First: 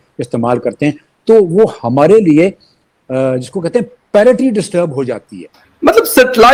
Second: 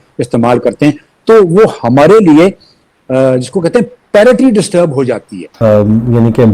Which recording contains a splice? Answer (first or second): second